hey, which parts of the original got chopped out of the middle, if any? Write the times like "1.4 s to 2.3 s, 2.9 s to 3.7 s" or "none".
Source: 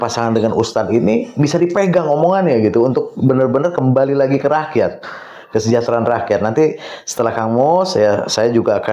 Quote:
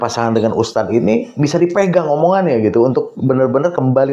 none